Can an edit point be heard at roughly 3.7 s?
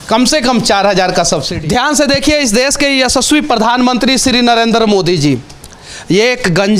no; 1 cut; at 1.5 s

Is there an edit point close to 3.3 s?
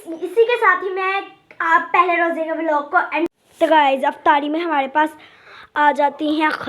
yes; 1 cut; at 3.3 s

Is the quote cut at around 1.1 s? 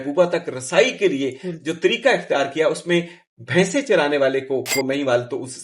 no; 1 cut; at 4.7 s

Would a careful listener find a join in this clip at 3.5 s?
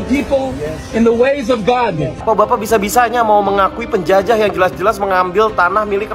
no; 1 cut; at 2.2 s

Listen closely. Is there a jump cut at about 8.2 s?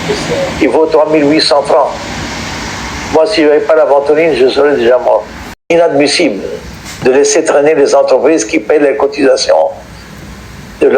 no; 1 cut; at 5.7 s

